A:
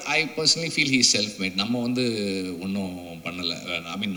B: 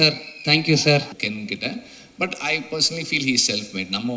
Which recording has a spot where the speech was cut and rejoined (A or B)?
B